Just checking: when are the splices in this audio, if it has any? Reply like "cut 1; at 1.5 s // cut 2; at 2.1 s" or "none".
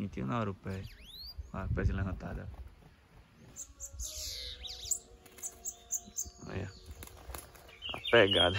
cut 1; at 3.6 s